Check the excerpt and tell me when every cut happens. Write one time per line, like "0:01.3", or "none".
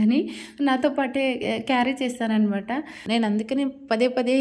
0:02.9